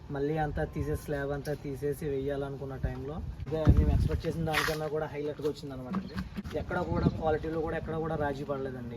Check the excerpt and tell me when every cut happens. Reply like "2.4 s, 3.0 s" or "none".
3.5 s, 6.4 s